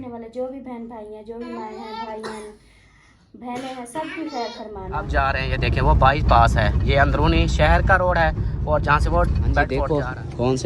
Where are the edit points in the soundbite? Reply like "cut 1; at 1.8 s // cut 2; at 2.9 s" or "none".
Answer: cut 1; at 5.1 s // cut 2; at 9.7 s